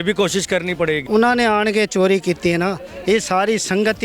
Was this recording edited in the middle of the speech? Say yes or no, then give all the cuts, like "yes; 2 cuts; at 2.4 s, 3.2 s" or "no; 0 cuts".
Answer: yes; 1 cut; at 1.0 s